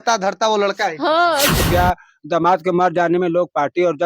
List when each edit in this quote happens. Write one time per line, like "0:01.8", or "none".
0:01.6